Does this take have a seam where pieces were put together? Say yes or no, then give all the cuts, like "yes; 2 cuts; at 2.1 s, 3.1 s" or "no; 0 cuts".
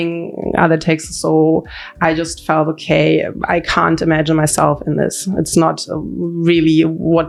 no; 0 cuts